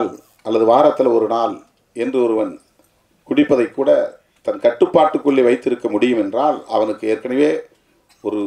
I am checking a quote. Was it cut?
no; 0 cuts

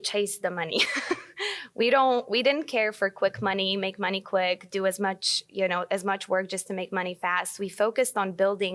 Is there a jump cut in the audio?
no; 0 cuts

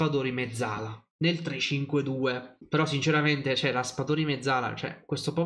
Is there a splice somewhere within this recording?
yes; 1 cut; at 2.5 s

